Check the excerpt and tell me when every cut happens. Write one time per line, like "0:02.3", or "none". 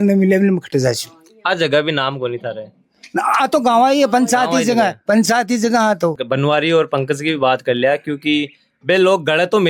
0:06.2